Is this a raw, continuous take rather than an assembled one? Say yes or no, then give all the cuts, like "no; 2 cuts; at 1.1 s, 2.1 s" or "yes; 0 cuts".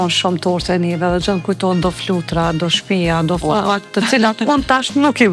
yes; 0 cuts